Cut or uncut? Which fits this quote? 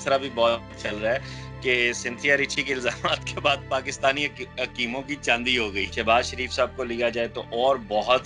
cut